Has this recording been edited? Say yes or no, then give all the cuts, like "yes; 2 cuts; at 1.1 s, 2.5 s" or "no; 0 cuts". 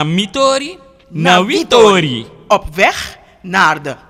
no; 0 cuts